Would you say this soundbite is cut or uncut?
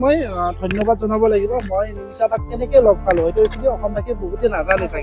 uncut